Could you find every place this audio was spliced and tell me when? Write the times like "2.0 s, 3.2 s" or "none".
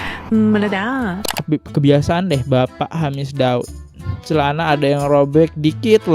1.2 s